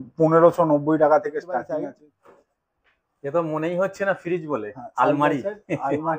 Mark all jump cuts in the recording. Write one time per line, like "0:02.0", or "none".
0:01.8